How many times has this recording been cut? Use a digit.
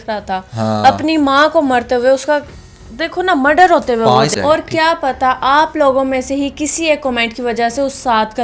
1